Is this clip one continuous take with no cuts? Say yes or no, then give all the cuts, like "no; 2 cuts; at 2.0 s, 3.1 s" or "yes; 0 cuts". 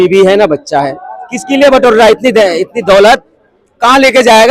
yes; 0 cuts